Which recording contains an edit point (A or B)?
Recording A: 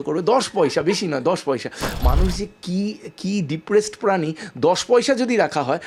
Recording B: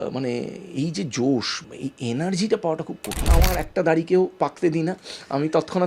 B